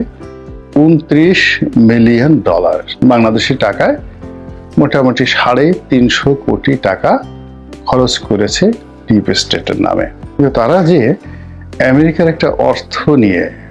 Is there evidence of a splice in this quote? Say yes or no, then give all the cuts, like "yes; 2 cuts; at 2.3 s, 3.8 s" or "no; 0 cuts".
yes; 2 cuts; at 2.8 s, 10.4 s